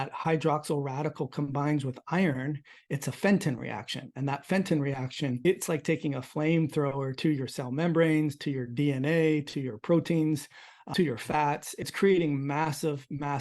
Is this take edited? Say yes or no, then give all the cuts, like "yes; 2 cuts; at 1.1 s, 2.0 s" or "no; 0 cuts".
yes; 3 cuts; at 5.4 s, 10.8 s, 11.9 s